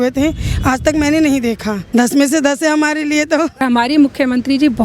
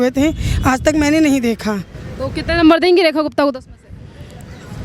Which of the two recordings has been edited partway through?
first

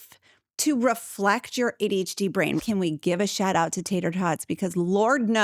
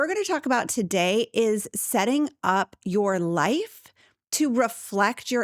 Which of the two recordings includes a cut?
first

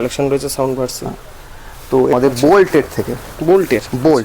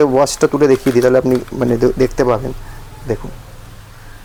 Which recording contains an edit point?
first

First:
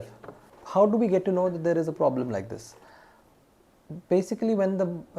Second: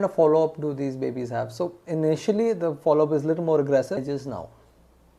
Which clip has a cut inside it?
second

